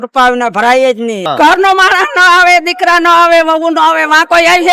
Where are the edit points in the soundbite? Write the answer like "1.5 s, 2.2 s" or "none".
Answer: 1.2 s